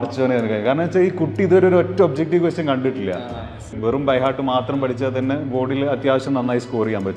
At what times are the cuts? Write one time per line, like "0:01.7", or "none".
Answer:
0:03.7